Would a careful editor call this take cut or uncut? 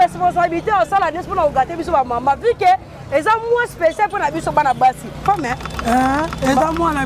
cut